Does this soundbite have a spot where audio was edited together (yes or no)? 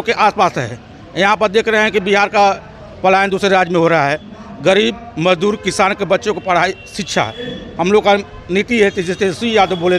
no